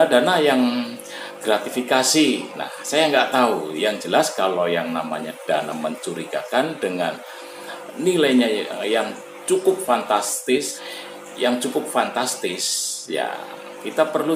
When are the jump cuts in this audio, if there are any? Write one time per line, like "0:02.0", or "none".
0:10.8